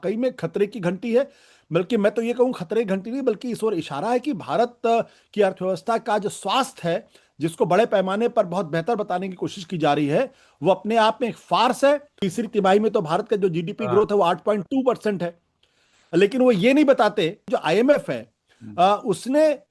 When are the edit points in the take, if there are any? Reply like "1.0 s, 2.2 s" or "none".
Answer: 12.2 s, 17.4 s